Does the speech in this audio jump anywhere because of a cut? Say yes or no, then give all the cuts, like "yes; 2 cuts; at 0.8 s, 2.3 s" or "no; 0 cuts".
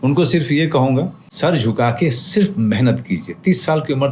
yes; 1 cut; at 1.2 s